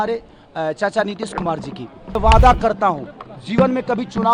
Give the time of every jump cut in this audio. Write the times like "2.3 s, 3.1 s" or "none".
2.2 s